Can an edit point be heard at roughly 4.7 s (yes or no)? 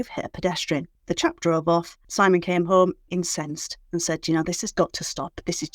yes